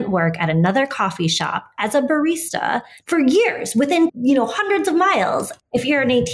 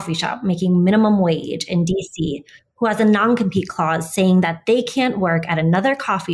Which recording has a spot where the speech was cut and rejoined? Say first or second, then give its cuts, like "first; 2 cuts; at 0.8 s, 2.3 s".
first; 3 cuts; at 2.9 s, 4.2 s, 5.4 s